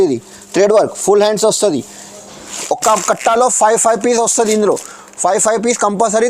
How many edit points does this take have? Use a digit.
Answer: 1